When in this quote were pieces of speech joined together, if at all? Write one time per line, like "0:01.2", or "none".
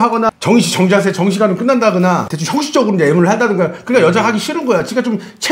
none